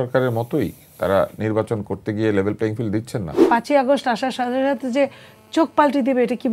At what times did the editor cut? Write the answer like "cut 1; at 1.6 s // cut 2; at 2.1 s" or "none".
cut 1; at 3.5 s